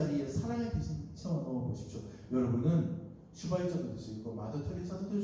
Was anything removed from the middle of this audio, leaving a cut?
no; 0 cuts

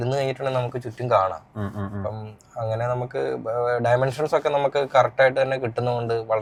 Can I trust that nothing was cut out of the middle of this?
yes; 0 cuts

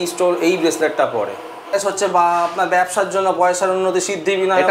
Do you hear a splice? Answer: yes; 1 cut; at 1.7 s

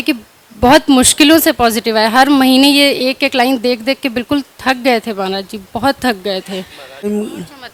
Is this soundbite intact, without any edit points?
yes; 0 cuts

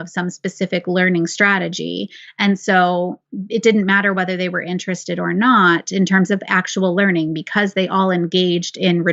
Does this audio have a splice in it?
no; 0 cuts

